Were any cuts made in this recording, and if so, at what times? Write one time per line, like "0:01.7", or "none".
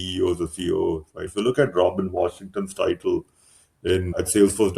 none

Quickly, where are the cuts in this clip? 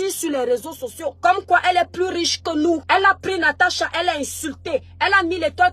0:01.1
0:02.8

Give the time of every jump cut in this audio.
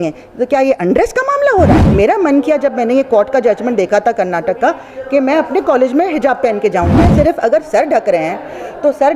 0:01.8
0:07.1

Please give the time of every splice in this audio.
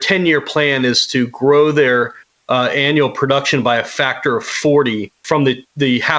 0:05.1

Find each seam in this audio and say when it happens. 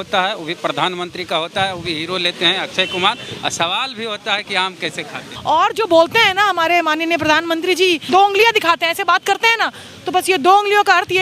0:05.2
0:08.0

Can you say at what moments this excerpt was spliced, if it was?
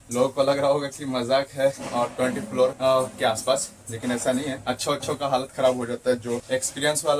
0:02.8
0:04.6
0:06.4

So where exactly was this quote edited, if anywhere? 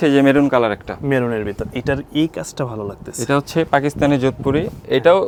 none

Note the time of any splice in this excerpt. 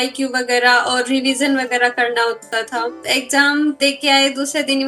0:03.0
0:03.8

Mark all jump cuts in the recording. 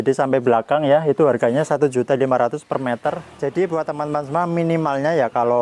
0:03.3

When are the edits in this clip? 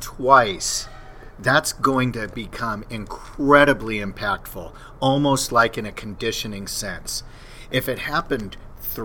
none

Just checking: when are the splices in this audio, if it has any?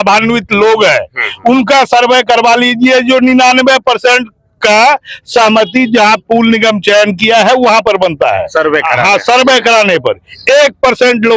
none

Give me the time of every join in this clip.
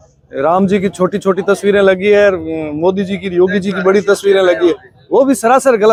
none

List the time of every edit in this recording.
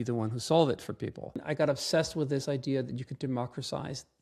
0:01.4

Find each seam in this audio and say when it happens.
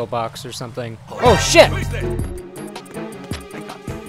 0:01.7

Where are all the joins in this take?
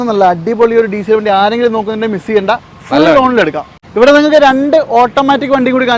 0:03.6

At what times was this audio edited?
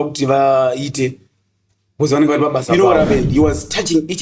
0:02.7

